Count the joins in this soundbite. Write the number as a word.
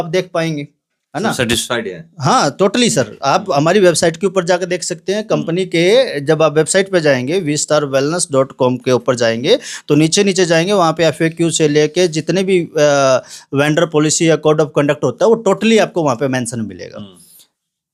zero